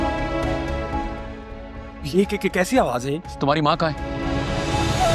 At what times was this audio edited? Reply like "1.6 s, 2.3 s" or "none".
1.2 s, 4.1 s